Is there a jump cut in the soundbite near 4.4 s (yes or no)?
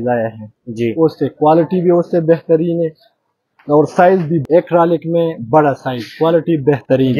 yes